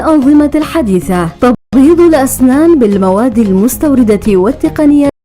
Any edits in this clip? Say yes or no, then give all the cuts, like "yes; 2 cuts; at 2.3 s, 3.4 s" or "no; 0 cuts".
yes; 1 cut; at 1.6 s